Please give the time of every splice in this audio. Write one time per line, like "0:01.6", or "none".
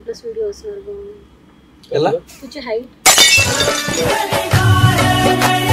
none